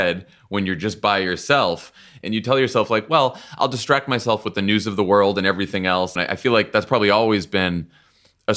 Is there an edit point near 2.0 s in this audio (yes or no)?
yes